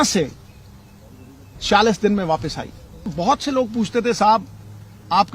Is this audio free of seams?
no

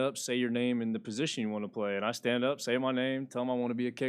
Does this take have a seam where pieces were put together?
no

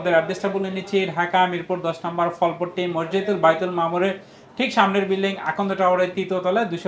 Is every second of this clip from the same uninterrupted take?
yes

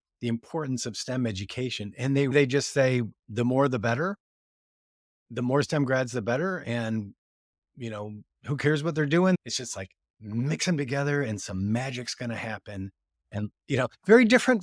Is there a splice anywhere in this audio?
yes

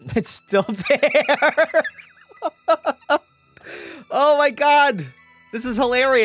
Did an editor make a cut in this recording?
no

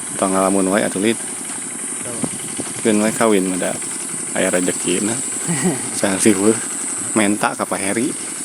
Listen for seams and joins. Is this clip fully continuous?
yes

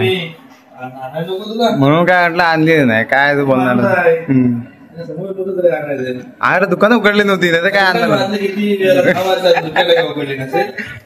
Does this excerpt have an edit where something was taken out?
no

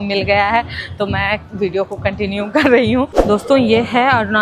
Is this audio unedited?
no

